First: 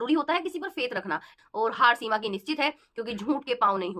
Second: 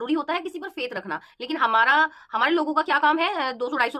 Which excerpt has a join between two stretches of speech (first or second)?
first